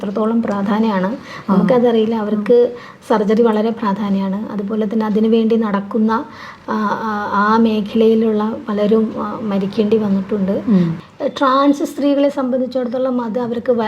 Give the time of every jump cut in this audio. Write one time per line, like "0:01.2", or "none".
0:11.0